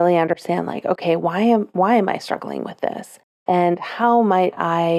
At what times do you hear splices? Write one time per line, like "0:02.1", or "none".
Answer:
none